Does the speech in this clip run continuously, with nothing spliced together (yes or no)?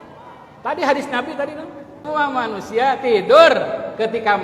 no